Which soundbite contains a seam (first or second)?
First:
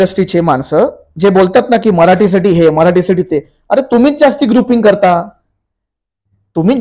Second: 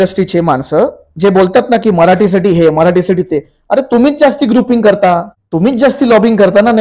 second